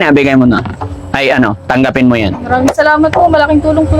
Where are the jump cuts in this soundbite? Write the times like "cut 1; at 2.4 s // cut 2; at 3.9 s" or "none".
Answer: none